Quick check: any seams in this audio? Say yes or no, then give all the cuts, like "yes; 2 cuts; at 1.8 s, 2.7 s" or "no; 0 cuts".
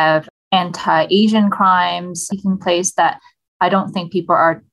no; 0 cuts